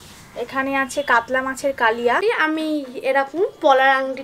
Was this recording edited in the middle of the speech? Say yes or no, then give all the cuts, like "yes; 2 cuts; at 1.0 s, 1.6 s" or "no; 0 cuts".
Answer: yes; 1 cut; at 2.2 s